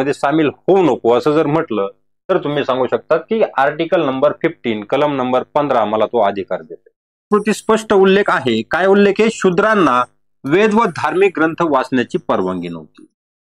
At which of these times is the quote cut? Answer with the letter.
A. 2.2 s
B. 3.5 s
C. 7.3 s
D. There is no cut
C